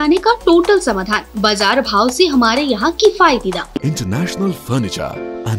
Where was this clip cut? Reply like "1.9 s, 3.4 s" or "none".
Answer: 3.8 s